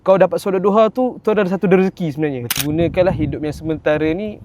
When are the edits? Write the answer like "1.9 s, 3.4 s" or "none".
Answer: 2.6 s